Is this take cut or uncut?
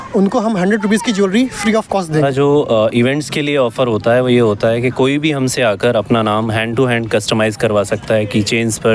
cut